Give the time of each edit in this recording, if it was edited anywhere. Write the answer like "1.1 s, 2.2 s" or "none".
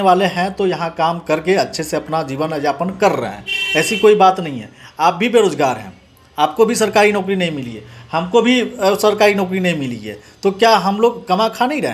none